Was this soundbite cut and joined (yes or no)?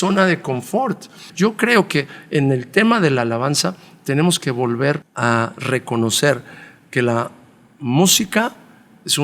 yes